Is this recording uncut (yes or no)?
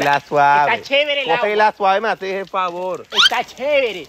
yes